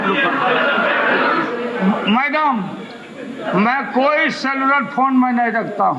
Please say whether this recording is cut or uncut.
cut